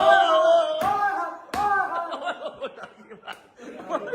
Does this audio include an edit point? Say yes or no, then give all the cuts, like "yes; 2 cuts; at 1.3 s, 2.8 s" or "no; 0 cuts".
no; 0 cuts